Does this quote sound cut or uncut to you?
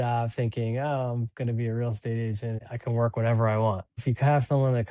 cut